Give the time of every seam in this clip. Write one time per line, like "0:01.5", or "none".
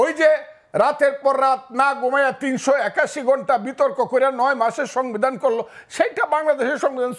none

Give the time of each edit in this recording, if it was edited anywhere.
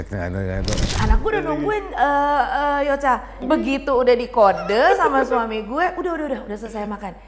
0:01.0
0:03.4

